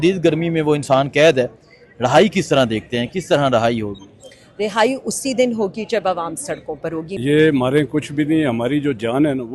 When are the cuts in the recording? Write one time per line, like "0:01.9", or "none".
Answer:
0:07.1

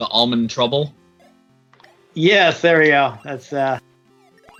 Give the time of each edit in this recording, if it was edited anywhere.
none

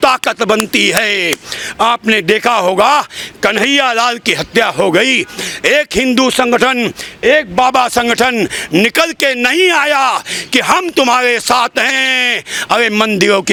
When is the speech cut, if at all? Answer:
none

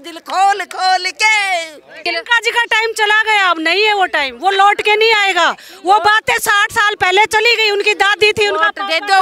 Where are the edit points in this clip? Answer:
0:02.0

